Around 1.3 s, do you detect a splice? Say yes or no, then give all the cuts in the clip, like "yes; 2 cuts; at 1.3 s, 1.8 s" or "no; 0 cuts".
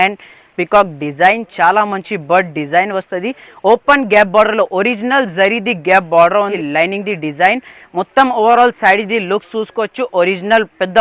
no; 1 cut; at 6.5 s